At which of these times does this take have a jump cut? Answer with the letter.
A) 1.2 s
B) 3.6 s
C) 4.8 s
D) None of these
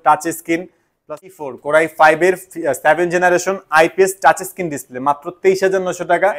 A